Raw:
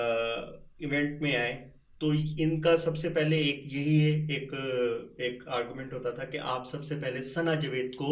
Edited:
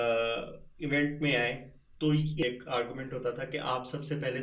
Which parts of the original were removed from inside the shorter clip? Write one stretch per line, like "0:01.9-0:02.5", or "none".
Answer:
0:02.4-0:05.2

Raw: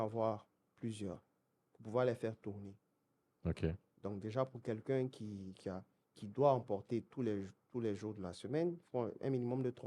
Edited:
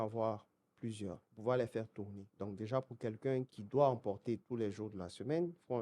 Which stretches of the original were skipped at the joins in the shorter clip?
0:01.3-0:01.7
0:02.7-0:03.9
0:05.2-0:06.2
0:07.1-0:07.7

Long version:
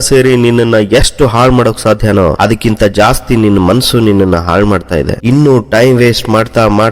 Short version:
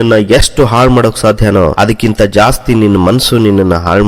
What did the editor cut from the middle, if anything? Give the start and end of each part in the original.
none

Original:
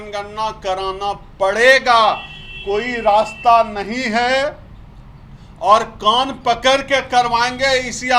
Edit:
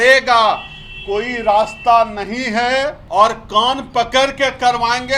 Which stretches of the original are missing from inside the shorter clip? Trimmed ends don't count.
0:04.6-0:05.5

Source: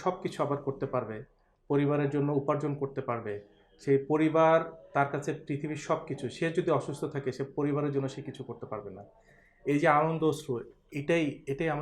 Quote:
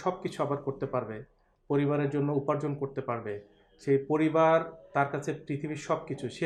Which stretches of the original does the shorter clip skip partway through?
none

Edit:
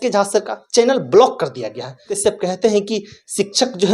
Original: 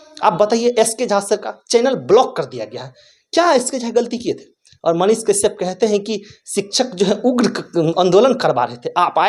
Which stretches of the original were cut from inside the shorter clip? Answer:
0:03.1-0:05.3

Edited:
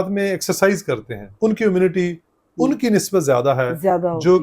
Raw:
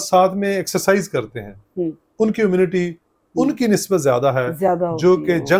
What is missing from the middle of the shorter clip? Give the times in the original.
0:01.5-0:02.0

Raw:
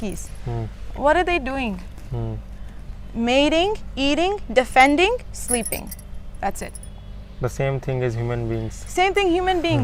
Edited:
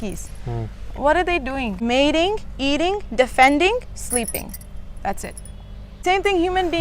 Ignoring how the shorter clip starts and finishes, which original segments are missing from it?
0:01.8-0:03.1
0:07.2-0:08.8

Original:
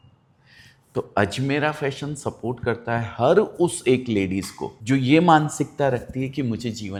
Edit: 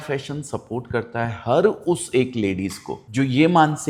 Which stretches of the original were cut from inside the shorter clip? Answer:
none

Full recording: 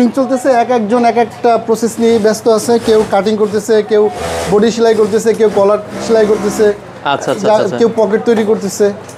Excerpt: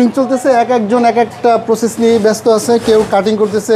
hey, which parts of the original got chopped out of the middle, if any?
none

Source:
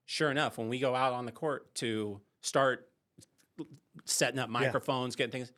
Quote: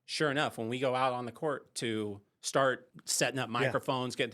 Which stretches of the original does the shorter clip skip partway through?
0:03.0-0:04.0

